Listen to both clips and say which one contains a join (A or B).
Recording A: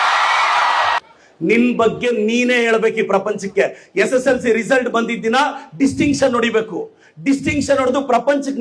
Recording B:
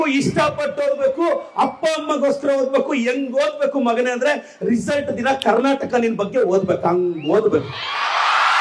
A